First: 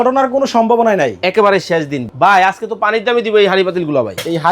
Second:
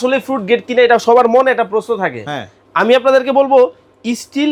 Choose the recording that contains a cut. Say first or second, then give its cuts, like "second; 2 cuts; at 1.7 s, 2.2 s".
first; 1 cut; at 2.1 s